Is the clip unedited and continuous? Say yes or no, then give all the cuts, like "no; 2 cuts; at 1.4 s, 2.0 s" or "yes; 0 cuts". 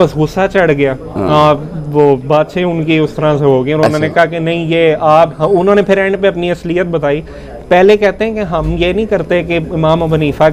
yes; 0 cuts